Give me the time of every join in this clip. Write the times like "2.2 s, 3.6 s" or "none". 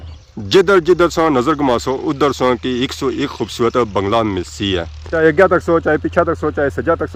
none